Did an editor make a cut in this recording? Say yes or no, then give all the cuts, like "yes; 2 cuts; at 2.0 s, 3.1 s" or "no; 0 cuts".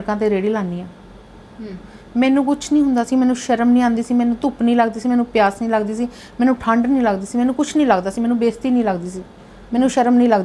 no; 0 cuts